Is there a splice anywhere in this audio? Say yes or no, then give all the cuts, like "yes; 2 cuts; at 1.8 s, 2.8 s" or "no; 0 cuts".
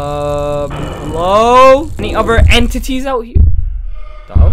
no; 0 cuts